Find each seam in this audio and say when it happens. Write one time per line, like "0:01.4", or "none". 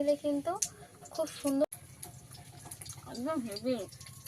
0:01.6